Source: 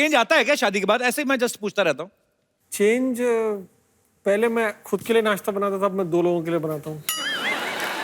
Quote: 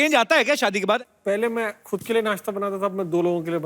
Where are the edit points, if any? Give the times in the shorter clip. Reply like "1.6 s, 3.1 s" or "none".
1.0 s